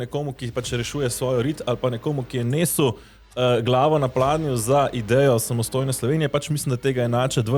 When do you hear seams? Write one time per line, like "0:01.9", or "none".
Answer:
none